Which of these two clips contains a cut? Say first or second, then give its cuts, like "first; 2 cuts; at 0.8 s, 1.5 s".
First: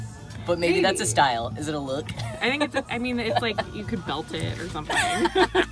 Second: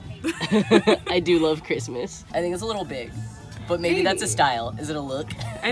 second; 1 cut; at 2.2 s